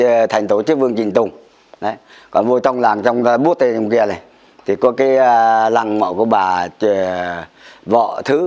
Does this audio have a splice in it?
no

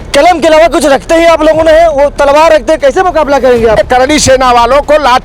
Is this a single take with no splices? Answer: no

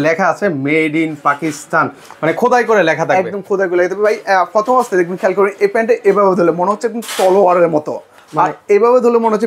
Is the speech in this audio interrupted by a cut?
no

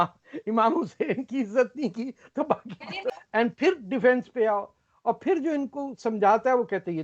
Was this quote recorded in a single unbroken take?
no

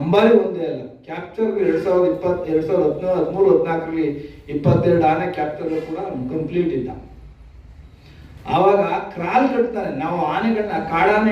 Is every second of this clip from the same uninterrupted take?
yes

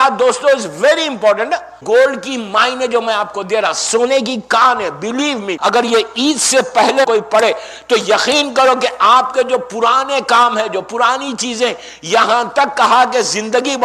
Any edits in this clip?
yes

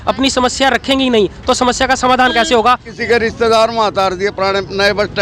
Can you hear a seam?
yes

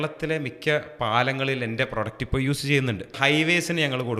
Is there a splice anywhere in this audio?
yes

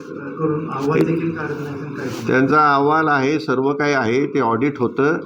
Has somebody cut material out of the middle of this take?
no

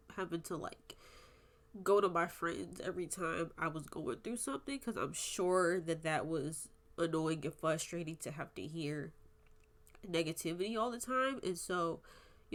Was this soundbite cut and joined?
no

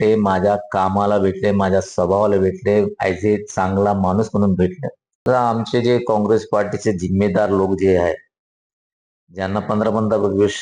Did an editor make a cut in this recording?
yes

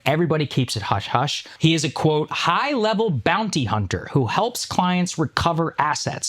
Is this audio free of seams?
no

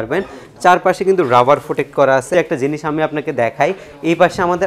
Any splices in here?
yes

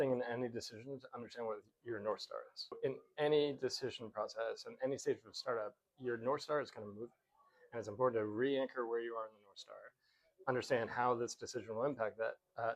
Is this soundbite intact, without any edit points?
no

